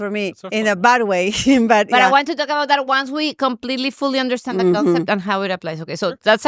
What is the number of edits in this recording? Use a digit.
0